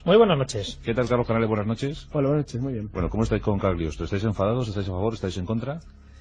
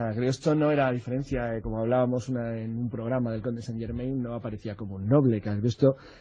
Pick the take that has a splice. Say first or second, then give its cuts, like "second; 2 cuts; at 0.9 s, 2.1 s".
first; 1 cut; at 3.3 s